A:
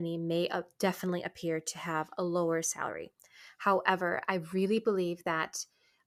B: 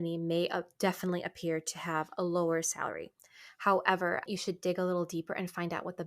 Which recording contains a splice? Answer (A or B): B